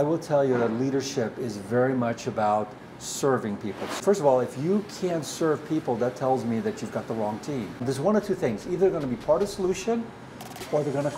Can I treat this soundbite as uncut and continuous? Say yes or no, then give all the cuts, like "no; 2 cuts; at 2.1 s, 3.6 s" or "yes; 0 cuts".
no; 2 cuts; at 4.0 s, 7.8 s